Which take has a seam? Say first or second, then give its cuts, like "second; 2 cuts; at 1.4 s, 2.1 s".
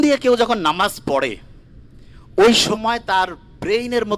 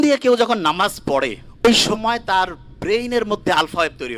second; 1 cut; at 1.6 s